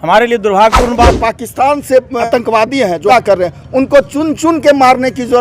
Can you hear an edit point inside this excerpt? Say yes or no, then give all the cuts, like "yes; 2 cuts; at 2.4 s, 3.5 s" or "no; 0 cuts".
yes; 3 cuts; at 1.0 s, 2.2 s, 3.1 s